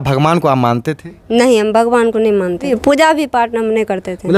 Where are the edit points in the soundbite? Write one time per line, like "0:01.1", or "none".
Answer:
0:02.8